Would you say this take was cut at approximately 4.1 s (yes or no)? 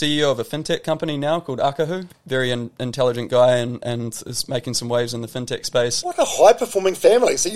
no